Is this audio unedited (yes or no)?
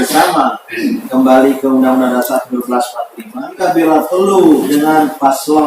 no